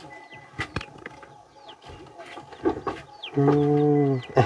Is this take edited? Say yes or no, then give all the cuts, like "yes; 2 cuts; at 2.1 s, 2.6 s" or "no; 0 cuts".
no; 0 cuts